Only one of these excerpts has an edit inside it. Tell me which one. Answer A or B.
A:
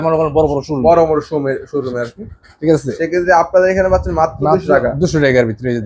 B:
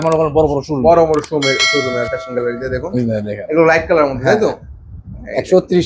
B